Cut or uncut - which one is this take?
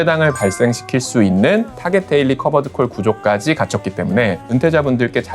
cut